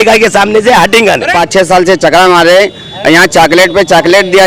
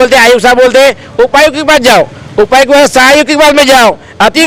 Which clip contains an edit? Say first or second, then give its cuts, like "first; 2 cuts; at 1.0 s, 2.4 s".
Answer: first; 1 cut; at 1.3 s